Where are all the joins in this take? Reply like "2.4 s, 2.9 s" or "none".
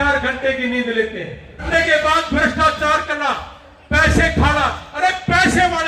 1.7 s